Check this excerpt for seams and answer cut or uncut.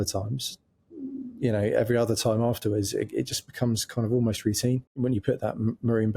cut